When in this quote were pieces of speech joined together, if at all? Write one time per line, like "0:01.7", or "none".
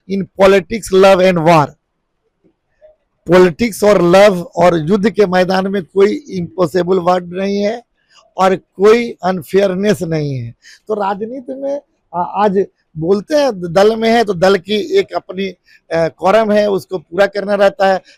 none